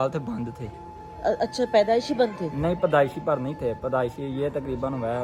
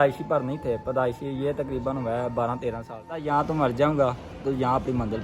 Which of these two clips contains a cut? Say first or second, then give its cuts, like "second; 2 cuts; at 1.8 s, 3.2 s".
second; 1 cut; at 3.2 s